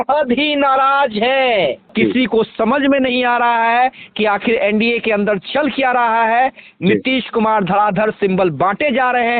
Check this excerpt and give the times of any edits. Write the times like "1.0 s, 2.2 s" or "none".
1.8 s